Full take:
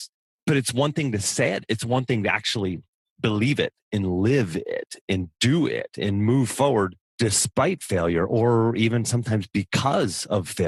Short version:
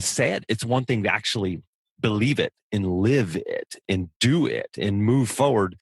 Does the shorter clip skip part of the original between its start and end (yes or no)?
no